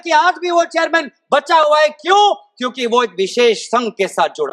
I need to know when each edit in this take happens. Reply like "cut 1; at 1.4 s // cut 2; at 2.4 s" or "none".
none

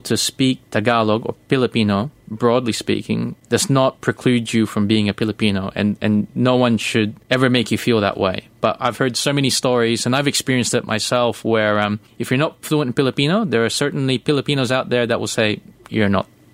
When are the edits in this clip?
cut 1; at 3.3 s // cut 2; at 7.2 s // cut 3; at 12.1 s

